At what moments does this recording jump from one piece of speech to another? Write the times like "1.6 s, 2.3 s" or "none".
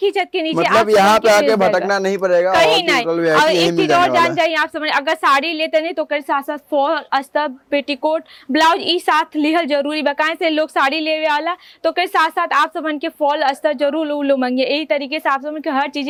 none